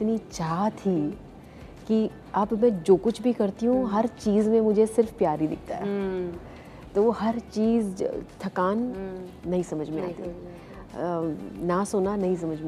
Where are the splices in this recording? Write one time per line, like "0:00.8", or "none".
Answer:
none